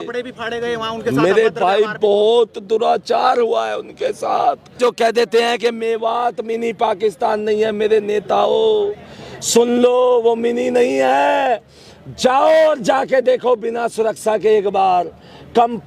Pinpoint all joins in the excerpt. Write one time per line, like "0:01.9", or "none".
0:04.8